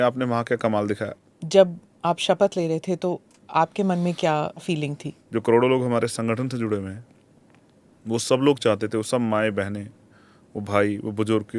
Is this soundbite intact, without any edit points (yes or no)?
no